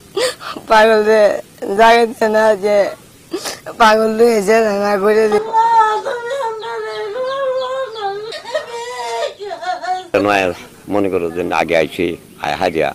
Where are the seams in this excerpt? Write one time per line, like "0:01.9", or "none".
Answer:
none